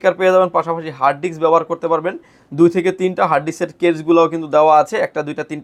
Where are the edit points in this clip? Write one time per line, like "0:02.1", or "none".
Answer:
none